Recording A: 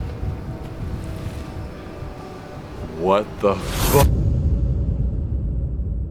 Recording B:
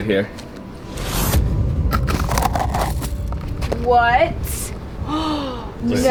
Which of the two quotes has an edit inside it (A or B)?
A